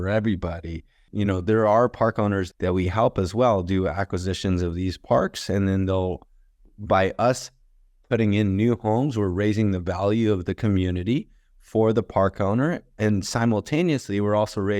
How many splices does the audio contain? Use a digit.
2